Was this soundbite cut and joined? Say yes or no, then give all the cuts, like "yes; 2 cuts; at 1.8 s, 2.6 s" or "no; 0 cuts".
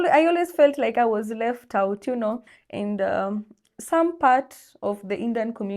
yes; 1 cut; at 2.5 s